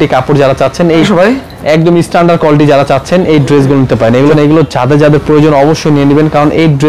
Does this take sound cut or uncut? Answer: cut